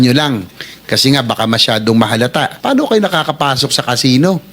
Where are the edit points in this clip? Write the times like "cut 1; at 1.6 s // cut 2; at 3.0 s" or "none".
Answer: cut 1; at 2.6 s